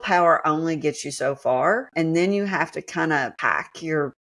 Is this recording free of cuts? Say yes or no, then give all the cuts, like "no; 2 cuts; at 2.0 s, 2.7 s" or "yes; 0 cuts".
no; 2 cuts; at 1.9 s, 3.4 s